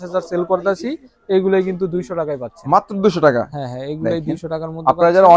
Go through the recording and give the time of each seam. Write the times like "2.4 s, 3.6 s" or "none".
none